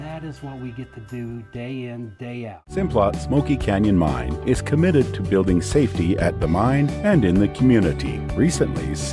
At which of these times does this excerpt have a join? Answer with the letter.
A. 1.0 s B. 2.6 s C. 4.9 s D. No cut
B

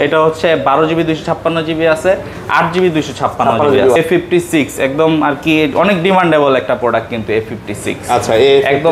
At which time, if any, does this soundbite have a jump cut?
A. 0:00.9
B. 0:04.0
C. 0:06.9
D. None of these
B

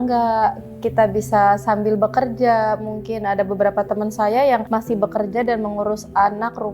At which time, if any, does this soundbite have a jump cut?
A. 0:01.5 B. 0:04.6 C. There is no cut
B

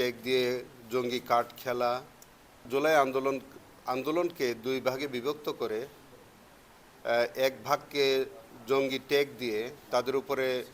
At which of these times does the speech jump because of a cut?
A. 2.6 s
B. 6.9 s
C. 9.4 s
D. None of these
A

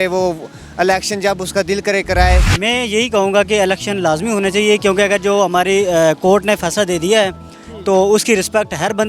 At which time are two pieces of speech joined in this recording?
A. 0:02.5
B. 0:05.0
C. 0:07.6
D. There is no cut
A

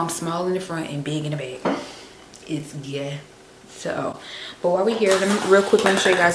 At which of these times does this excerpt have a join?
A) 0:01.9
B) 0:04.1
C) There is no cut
C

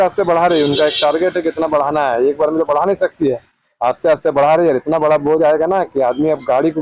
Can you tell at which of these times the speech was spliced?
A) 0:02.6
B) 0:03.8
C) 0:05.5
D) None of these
D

